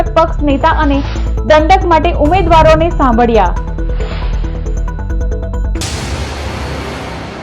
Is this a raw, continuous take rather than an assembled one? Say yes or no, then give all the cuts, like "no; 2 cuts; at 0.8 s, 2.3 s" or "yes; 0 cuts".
no; 1 cut; at 5.8 s